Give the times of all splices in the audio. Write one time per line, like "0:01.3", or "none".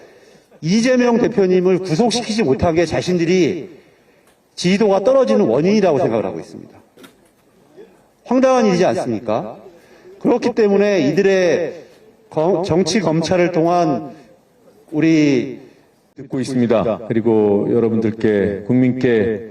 0:16.3